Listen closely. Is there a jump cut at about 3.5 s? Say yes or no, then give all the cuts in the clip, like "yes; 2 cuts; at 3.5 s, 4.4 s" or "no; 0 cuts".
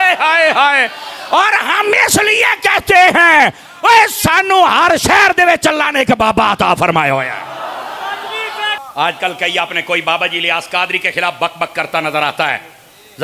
no; 1 cut; at 8.8 s